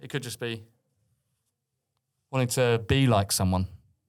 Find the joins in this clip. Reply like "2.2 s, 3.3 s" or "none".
none